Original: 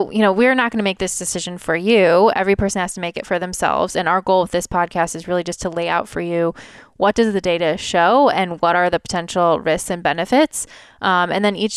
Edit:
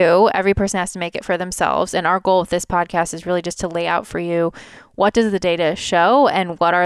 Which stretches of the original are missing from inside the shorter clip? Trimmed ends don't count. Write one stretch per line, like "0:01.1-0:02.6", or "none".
none